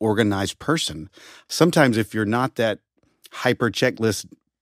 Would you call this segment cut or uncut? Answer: cut